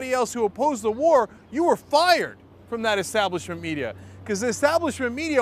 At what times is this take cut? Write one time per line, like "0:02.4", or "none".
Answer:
0:01.1